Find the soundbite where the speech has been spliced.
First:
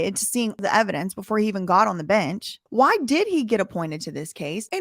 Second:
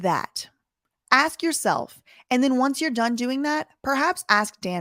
first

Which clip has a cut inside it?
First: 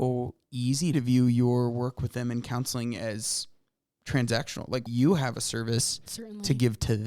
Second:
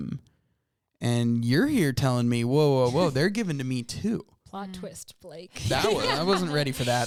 first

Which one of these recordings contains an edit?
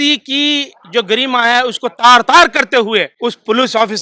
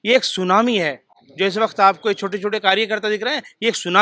first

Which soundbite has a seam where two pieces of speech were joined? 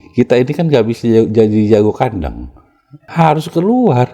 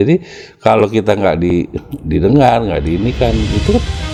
first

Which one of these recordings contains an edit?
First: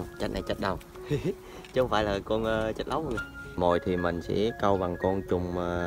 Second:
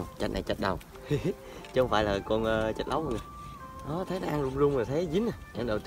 first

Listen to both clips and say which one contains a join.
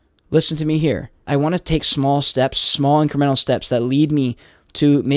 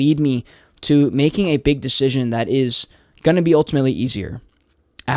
first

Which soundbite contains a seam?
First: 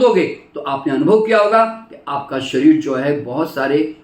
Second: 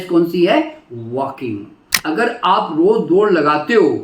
second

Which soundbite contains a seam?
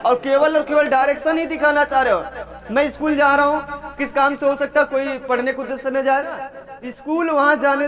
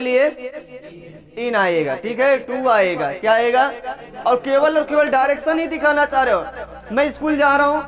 first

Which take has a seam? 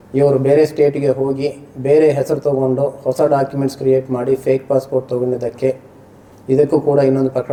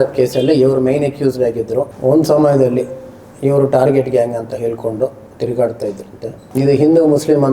second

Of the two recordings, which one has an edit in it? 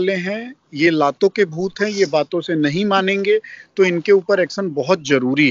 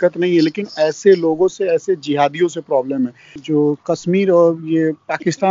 second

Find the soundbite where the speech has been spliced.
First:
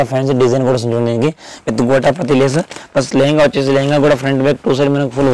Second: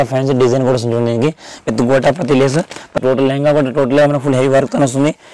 second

